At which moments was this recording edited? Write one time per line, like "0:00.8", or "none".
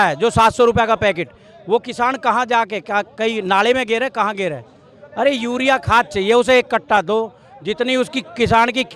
none